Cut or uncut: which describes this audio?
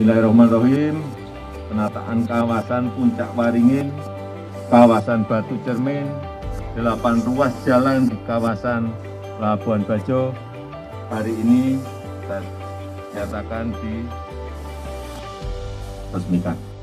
uncut